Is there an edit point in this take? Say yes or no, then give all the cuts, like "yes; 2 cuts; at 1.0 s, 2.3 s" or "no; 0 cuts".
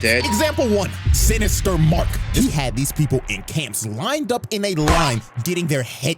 yes; 1 cut; at 2.2 s